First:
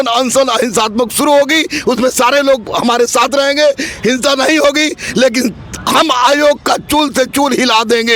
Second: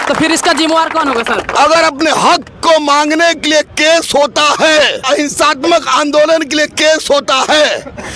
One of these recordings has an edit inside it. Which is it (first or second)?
second